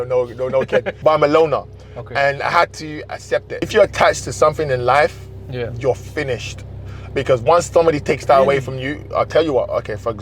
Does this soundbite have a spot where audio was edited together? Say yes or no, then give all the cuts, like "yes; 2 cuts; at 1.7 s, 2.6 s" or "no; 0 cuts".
yes; 2 cuts; at 0.9 s, 3.6 s